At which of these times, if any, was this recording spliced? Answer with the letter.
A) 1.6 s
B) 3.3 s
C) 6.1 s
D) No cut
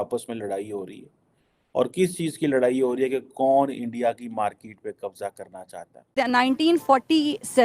C